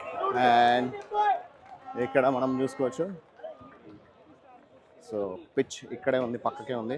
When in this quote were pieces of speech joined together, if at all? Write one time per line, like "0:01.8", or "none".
none